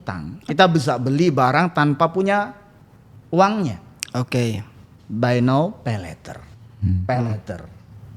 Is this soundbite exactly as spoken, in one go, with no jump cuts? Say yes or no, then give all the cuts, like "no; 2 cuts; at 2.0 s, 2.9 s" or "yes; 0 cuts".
yes; 0 cuts